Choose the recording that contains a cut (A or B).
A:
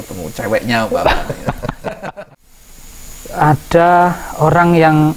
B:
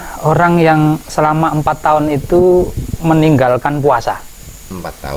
A